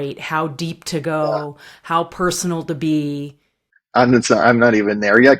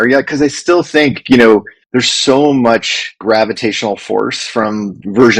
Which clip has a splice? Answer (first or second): second